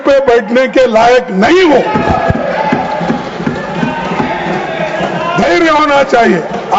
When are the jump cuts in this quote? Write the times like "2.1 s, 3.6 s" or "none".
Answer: none